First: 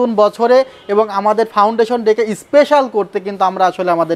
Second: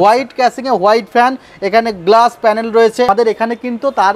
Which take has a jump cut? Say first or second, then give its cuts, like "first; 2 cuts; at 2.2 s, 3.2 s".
second; 1 cut; at 3.1 s